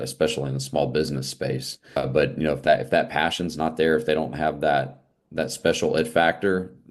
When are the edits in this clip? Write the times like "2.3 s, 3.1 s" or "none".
2.0 s